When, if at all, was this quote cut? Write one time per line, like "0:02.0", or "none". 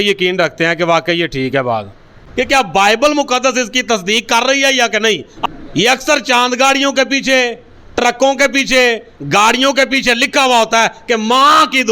0:02.2
0:05.3